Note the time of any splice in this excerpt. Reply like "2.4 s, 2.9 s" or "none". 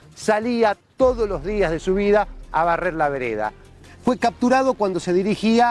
3.7 s